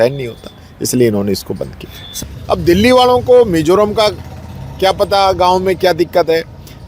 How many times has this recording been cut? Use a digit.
1